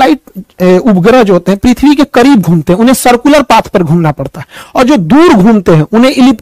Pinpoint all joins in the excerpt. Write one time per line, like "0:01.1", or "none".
none